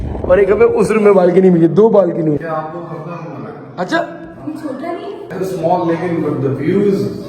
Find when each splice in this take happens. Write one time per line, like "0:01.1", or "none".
0:02.4